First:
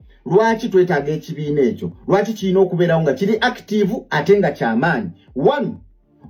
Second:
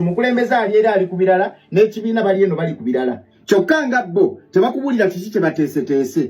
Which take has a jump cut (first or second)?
second